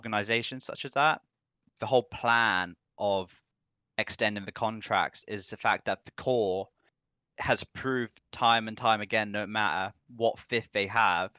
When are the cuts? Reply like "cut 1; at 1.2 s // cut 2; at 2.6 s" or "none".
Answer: cut 1; at 1.5 s